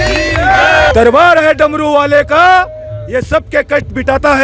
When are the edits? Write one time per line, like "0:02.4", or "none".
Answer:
0:00.9